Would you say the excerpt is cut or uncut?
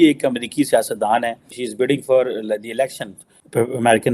cut